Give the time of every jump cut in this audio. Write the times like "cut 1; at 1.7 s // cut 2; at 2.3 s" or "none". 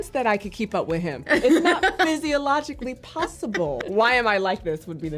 cut 1; at 3.8 s